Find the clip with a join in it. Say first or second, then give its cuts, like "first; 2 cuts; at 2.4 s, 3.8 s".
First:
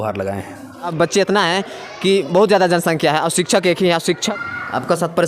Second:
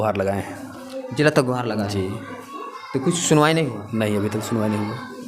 first; 2 cuts; at 0.9 s, 4.3 s